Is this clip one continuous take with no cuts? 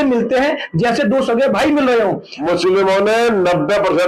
no; 1 cut; at 2.4 s

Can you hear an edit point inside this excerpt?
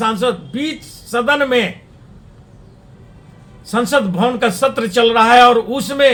no; 0 cuts

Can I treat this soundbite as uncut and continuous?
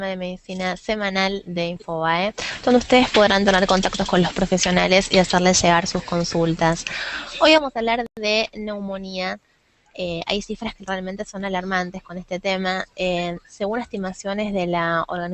yes; 0 cuts

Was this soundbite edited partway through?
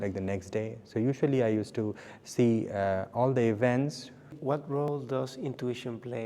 yes; 1 cut; at 4.3 s

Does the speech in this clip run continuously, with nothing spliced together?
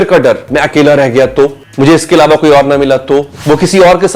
no; 2 cuts; at 1.6 s, 3.3 s

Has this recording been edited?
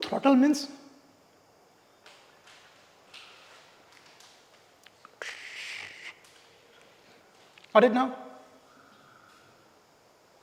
no; 0 cuts

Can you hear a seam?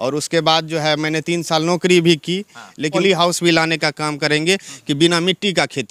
yes; 1 cut; at 3.0 s

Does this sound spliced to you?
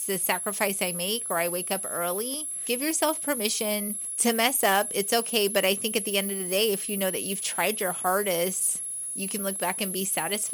yes; 2 cuts; at 2.6 s, 4.0 s

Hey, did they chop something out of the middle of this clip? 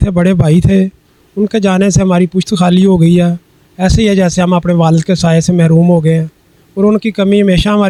no; 0 cuts

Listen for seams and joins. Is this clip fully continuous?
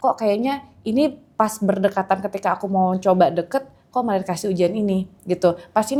yes; 0 cuts

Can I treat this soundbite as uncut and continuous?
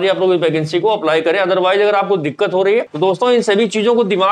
no; 1 cut; at 2.9 s

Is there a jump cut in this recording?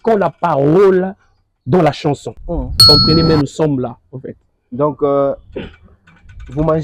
yes; 1 cut; at 2.7 s

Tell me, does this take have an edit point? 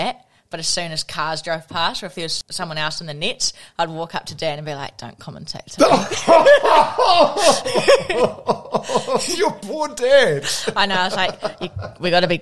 yes; 1 cut; at 2.4 s

